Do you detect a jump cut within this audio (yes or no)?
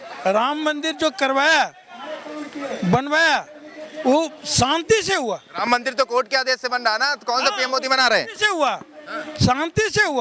no